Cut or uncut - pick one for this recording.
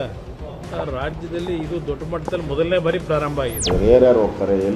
cut